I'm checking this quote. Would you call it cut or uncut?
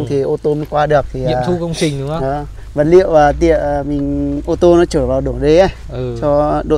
uncut